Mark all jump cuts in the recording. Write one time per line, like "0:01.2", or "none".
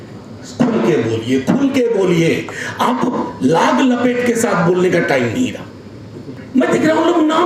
0:06.4